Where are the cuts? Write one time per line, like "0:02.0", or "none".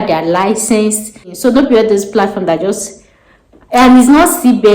0:01.2